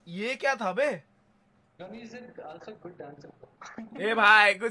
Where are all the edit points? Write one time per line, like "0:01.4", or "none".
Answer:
none